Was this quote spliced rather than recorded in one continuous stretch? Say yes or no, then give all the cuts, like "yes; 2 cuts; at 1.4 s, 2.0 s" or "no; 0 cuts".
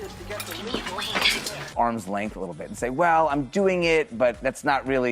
yes; 1 cut; at 1.6 s